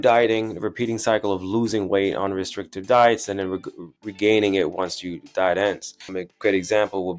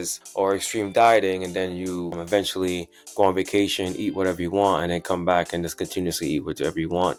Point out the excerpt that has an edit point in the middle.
first; 1 cut; at 6.1 s

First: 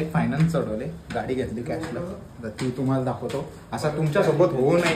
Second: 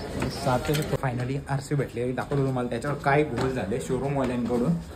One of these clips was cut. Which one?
second; 1 cut; at 1.0 s

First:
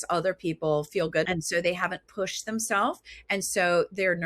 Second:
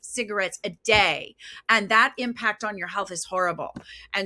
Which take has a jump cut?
first; 1 cut; at 1.3 s

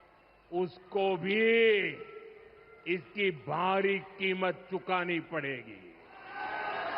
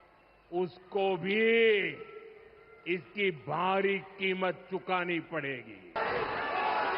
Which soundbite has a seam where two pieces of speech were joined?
second; 1 cut; at 6.0 s

